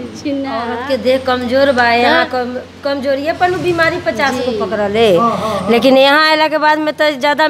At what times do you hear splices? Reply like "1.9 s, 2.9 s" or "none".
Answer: none